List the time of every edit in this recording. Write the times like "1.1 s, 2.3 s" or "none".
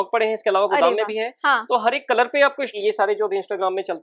2.7 s